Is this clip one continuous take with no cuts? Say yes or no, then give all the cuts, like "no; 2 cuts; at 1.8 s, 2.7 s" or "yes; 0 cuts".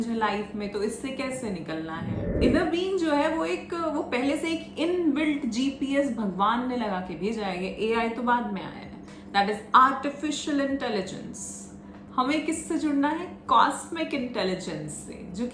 no; 1 cut; at 2.3 s